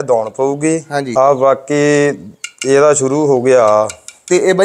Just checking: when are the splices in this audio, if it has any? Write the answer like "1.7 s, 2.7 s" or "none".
1.1 s